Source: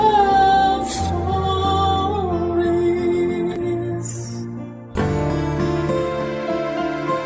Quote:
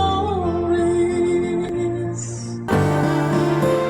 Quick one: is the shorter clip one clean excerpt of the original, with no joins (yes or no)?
no